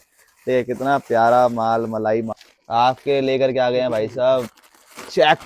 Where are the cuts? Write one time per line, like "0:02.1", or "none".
0:02.3